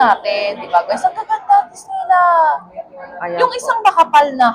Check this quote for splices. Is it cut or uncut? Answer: uncut